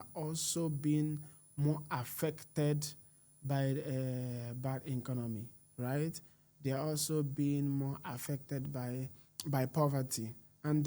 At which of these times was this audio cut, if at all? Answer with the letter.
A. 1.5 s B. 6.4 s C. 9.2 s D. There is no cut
C